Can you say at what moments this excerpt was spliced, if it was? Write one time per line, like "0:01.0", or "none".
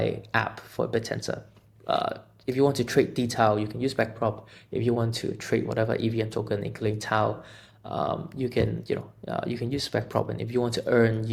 none

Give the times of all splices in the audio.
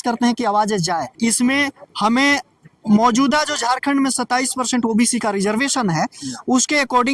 0:01.1

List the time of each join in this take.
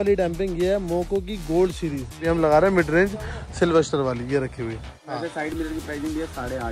0:02.2
0:05.1

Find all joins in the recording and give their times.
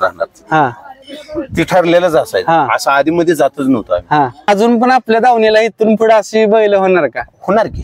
0:04.5

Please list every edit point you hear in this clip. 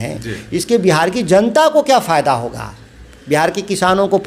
none

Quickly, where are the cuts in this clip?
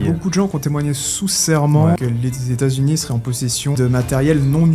0:02.0
0:03.8

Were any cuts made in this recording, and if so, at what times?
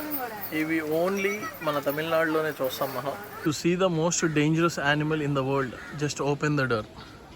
0:03.2

